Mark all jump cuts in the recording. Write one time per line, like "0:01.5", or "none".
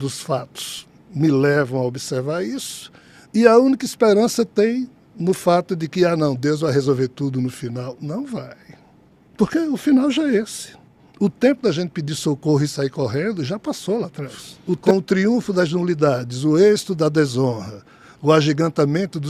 0:14.8